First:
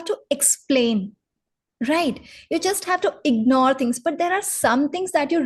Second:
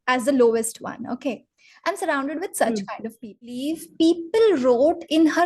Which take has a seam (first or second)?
second